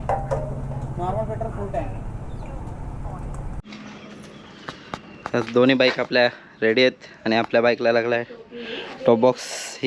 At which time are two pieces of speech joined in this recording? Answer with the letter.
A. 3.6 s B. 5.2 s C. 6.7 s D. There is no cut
A